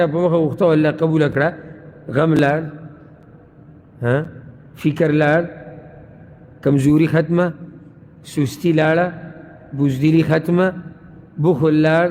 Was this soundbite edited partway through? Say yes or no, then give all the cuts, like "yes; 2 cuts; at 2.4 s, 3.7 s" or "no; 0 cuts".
no; 0 cuts